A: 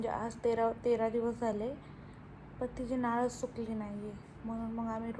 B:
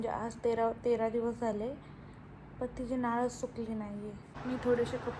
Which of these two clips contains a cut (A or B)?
B